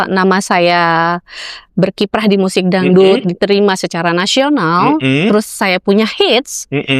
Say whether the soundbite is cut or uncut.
uncut